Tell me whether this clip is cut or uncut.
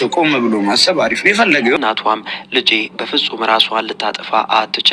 cut